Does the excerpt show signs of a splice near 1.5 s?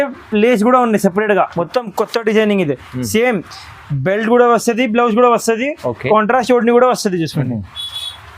yes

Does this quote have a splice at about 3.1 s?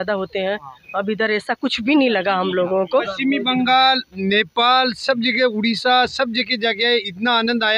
yes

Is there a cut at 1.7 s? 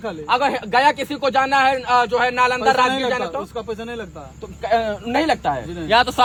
no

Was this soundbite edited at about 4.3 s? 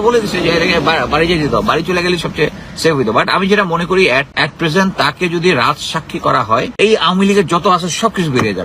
yes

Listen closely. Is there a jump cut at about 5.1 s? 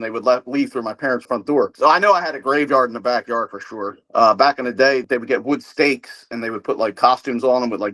yes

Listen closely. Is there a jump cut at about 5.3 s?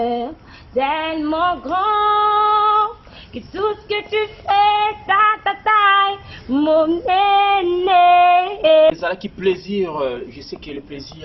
no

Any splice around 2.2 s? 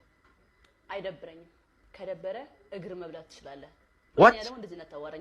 no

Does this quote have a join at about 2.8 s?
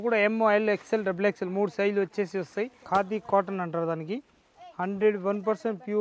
yes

